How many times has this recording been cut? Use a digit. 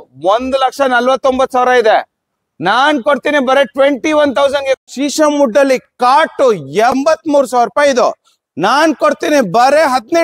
2